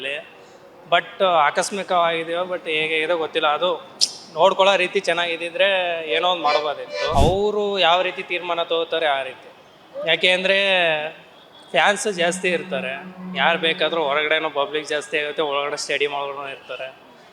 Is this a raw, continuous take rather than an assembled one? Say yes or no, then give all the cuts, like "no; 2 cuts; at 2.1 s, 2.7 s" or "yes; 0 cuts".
no; 1 cut; at 7.1 s